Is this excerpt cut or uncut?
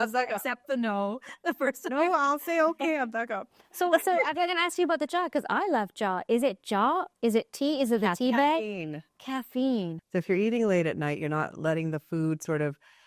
cut